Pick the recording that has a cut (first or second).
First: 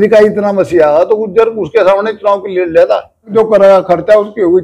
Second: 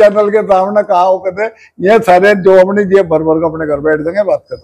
first